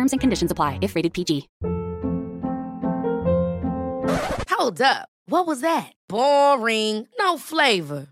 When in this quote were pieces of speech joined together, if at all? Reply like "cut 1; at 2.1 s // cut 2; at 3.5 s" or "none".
cut 1; at 1.5 s